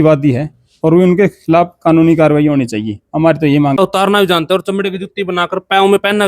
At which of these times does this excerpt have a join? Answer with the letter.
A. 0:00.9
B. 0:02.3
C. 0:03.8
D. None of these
C